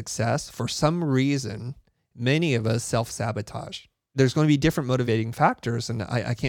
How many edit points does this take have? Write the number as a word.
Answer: two